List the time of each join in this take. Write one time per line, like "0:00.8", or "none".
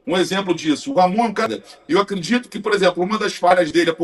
0:01.5